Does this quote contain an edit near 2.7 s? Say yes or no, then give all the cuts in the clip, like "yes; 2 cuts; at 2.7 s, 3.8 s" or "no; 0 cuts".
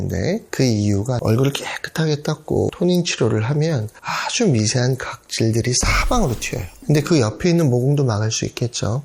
yes; 3 cuts; at 1.2 s, 2.7 s, 6.7 s